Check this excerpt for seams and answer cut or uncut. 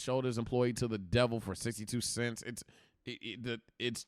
uncut